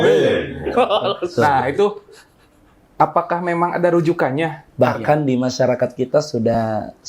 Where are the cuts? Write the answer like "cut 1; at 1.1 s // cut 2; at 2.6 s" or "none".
cut 1; at 4.6 s